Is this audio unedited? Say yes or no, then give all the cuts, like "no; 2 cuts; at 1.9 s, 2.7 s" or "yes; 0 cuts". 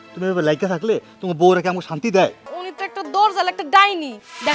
no; 1 cut; at 2.4 s